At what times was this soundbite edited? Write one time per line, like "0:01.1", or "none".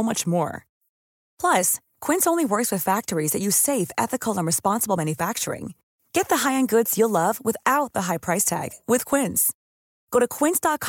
none